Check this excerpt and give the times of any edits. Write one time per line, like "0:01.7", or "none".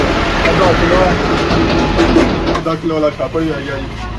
0:02.6